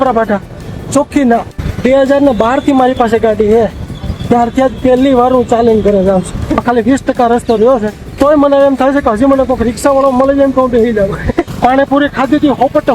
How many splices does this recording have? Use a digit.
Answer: 4